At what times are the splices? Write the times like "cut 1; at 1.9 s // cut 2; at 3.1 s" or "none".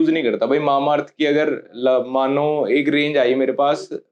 none